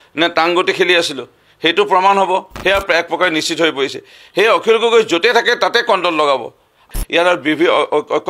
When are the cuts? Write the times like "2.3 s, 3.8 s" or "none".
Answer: 2.5 s, 6.9 s